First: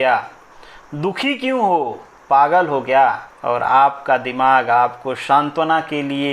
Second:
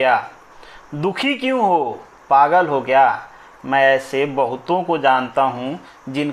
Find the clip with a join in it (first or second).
first